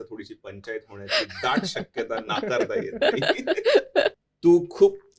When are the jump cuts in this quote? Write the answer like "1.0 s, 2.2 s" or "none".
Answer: 4.3 s